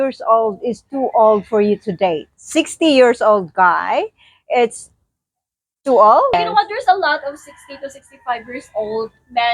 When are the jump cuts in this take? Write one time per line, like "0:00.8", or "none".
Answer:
0:06.3